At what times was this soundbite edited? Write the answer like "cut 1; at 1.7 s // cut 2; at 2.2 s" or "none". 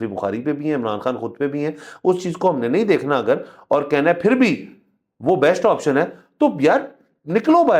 none

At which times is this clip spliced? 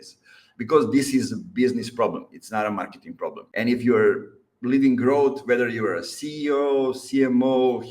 cut 1; at 3.4 s

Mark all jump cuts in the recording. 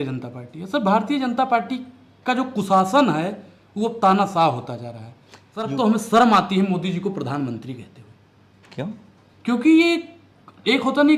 cut 1; at 5.7 s

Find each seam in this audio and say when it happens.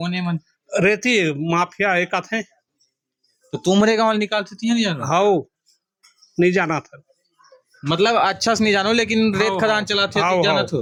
none

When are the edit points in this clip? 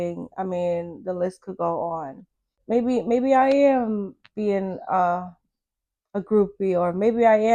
cut 1; at 2.6 s

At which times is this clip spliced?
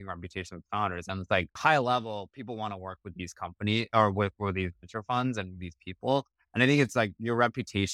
cut 1; at 1.6 s

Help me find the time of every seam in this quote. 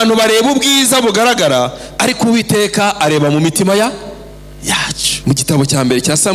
cut 1; at 5.1 s

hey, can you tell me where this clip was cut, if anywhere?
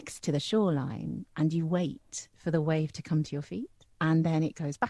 cut 1; at 1.2 s // cut 2; at 3.8 s

